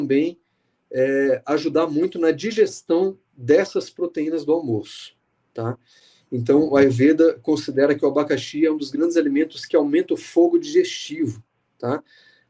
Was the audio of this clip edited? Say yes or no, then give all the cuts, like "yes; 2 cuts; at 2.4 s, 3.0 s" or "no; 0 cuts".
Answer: no; 0 cuts